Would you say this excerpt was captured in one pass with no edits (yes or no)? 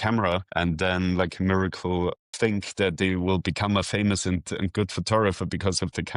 no